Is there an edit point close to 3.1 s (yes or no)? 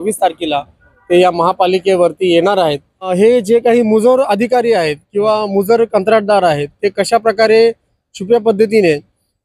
yes